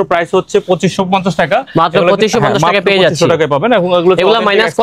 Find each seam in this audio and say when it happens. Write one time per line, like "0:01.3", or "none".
none